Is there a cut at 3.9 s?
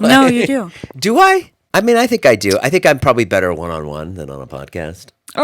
no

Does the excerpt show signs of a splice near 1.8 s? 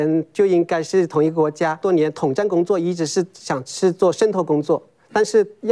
yes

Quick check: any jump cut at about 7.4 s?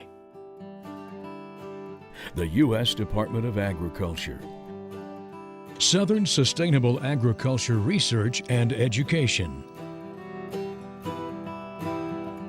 no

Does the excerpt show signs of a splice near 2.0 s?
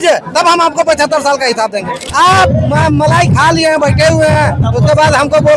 yes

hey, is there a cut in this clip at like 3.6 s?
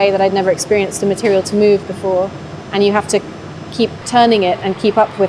no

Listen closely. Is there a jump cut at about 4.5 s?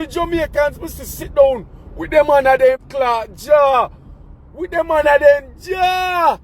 no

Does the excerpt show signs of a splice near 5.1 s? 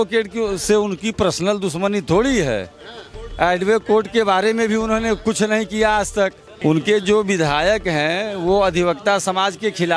no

